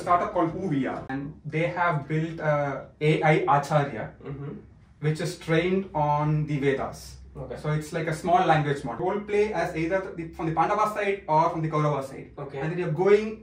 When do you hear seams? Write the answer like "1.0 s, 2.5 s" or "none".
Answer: 1.2 s, 9.0 s